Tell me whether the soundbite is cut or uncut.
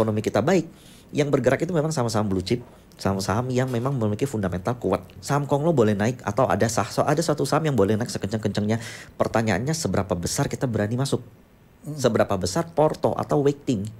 cut